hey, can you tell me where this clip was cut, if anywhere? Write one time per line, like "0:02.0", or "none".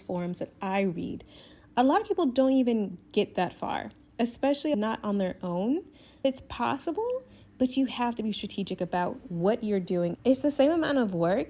0:06.2
0:10.2